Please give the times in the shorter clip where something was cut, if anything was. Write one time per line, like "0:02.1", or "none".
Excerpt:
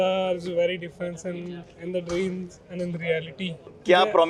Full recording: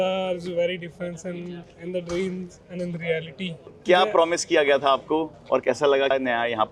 none